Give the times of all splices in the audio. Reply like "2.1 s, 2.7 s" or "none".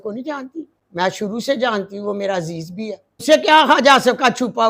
1.3 s, 3.2 s